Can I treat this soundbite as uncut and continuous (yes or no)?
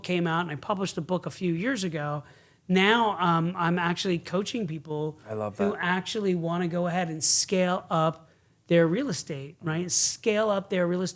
yes